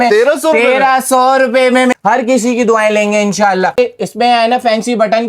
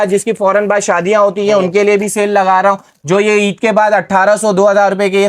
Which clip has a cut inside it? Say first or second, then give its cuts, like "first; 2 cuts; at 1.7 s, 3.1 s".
first; 2 cuts; at 1.9 s, 3.8 s